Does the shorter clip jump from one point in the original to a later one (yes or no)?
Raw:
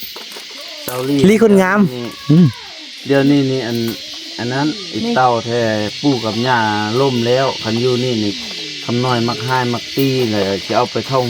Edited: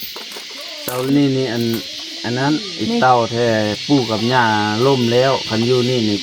yes